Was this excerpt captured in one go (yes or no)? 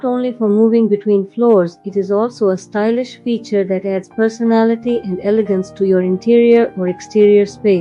yes